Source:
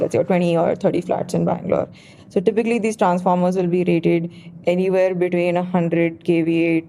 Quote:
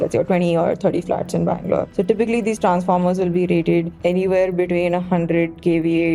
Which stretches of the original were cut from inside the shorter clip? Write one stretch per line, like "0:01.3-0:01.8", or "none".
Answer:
0:01.9-0:02.3
0:04.3-0:04.6